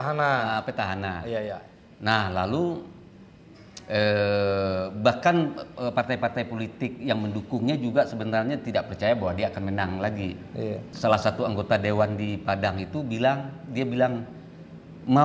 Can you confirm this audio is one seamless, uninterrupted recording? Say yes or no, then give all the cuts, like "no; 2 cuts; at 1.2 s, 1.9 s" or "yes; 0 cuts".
no; 1 cut; at 10.9 s